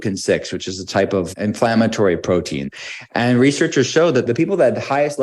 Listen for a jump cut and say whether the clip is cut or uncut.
cut